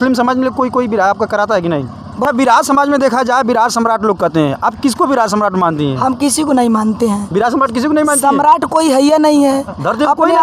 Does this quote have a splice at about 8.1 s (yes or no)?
no